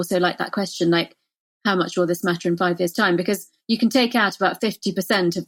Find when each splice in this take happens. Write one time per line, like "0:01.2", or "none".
none